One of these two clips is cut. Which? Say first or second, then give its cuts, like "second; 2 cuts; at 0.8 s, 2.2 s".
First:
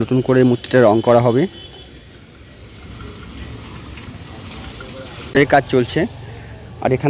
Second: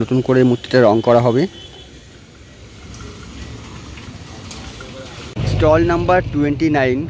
first; 1 cut; at 5.3 s